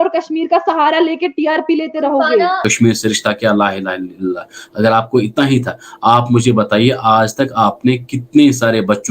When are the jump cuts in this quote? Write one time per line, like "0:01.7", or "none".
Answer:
0:02.7